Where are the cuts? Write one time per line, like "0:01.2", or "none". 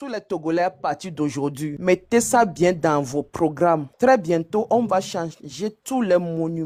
none